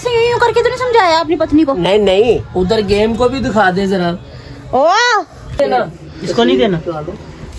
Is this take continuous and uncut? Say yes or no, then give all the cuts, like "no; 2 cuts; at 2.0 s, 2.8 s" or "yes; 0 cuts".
no; 2 cuts; at 1.0 s, 5.6 s